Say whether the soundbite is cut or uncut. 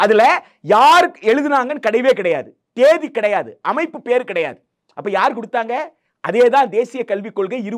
uncut